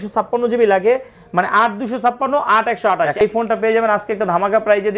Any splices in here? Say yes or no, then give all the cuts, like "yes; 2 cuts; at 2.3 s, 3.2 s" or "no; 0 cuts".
yes; 1 cut; at 3.2 s